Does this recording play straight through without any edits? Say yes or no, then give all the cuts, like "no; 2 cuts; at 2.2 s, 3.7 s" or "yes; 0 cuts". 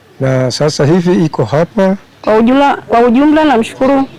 no; 1 cut; at 2.1 s